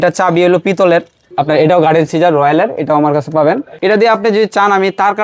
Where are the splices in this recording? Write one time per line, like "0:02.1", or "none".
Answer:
0:01.3
0:03.7